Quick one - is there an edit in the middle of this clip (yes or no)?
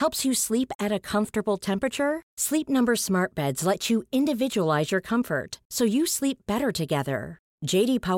no